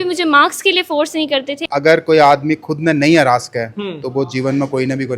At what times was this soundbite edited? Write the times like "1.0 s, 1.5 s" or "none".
1.7 s